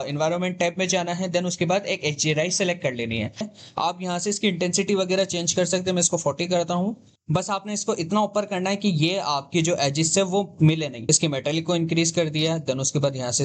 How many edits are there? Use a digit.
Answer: 3